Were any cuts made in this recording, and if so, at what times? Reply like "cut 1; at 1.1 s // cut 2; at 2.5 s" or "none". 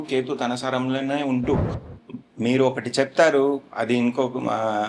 cut 1; at 1.7 s